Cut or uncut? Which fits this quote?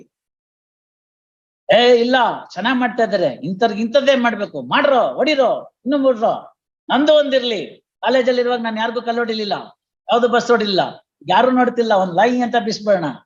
uncut